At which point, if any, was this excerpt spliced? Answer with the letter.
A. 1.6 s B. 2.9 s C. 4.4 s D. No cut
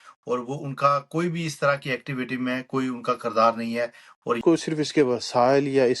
C